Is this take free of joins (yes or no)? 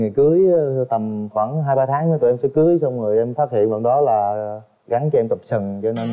yes